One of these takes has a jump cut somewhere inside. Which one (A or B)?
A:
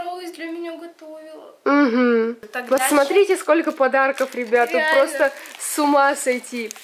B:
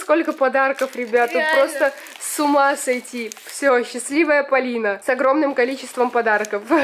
A